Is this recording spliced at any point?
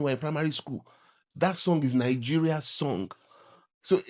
no; 0 cuts

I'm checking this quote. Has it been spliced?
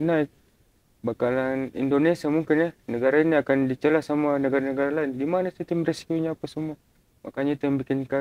no; 0 cuts

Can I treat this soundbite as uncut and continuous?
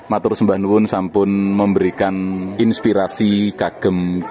no; 1 cut; at 2.5 s

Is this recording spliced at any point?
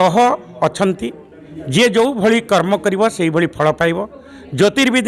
no; 0 cuts

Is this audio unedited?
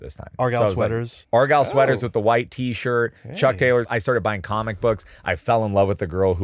no; 2 cuts; at 1.1 s, 3.9 s

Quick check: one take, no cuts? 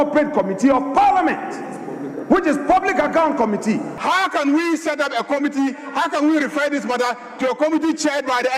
no; 1 cut; at 3.9 s

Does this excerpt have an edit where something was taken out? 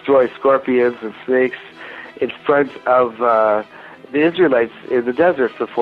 no; 0 cuts

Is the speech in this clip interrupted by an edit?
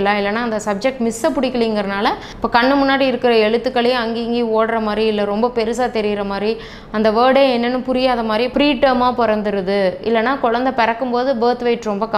yes; 2 cuts; at 2.3 s, 8.5 s

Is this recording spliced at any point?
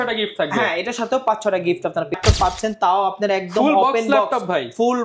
yes; 1 cut; at 2.1 s

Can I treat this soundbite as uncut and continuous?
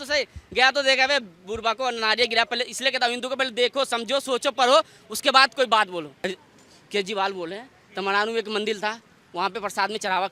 no; 1 cut; at 6.2 s

